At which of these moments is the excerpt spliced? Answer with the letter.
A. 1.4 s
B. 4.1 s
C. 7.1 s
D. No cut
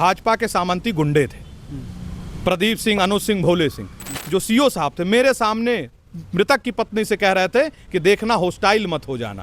B